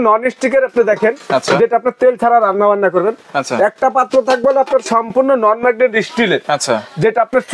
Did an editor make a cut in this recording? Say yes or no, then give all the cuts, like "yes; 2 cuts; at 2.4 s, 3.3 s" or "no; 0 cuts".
no; 0 cuts